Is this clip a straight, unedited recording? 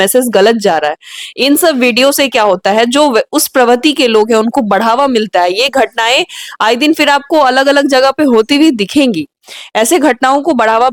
yes; 0 cuts

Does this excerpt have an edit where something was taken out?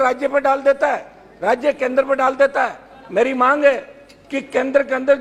no; 0 cuts

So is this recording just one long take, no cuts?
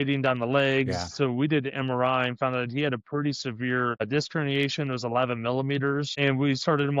yes; 0 cuts

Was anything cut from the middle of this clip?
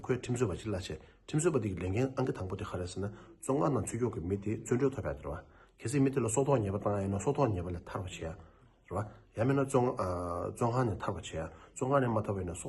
no; 0 cuts

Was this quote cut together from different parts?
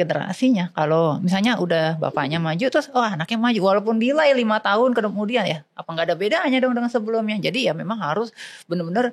no; 0 cuts

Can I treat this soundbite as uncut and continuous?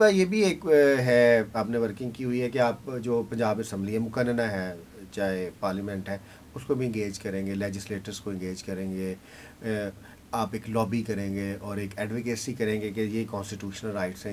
yes; 0 cuts

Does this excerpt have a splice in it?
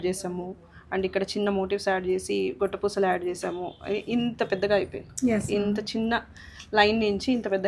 no; 0 cuts

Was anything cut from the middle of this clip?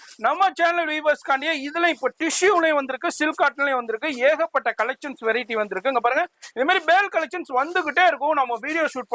no; 0 cuts

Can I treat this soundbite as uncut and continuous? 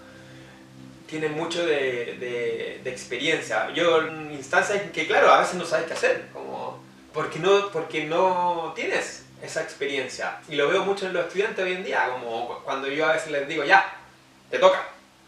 no; 1 cut; at 4.1 s

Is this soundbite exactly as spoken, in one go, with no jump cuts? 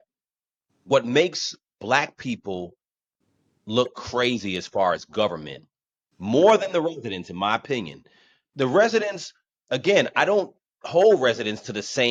yes; 0 cuts

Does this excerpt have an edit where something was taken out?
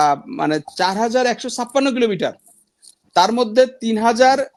no; 0 cuts

